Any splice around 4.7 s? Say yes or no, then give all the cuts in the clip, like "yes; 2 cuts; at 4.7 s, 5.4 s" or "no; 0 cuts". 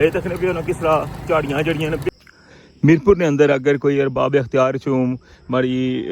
no; 1 cut; at 2.1 s